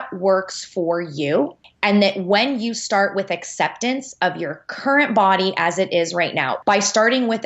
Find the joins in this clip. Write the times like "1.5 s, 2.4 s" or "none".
1.6 s, 6.5 s

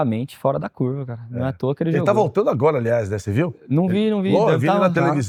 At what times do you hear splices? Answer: none

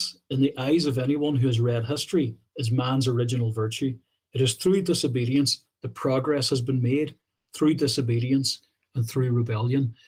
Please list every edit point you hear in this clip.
none

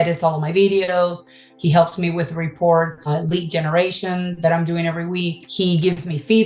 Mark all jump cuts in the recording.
3.1 s, 5.4 s

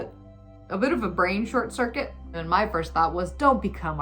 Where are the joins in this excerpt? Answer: 2.4 s

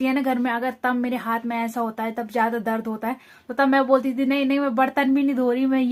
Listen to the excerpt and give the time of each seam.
none

